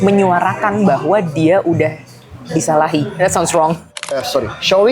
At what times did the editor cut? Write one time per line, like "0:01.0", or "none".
0:04.0